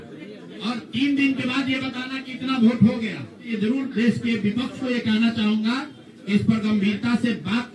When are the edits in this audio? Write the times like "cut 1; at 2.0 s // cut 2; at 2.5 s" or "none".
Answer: cut 1; at 3.4 s